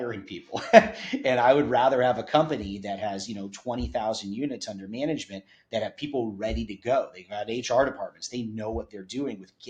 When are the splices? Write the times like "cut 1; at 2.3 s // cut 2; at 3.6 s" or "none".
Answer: none